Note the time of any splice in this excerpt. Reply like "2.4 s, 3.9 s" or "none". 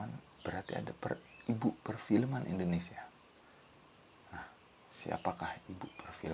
none

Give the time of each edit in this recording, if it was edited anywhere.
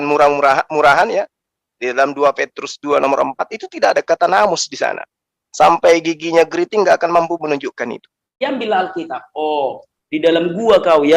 8.4 s

